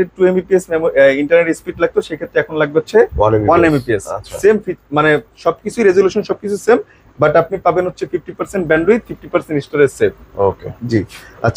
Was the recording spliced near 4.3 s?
no; 0 cuts

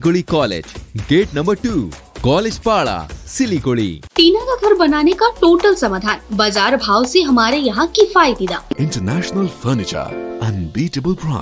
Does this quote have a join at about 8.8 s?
yes; 2 cuts; at 4.0 s, 8.8 s

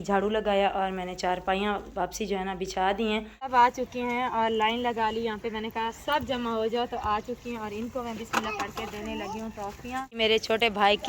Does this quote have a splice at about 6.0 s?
no; 2 cuts; at 3.4 s, 10.2 s

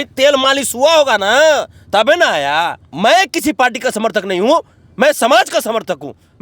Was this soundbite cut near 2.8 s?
yes; 1 cut; at 2.8 s

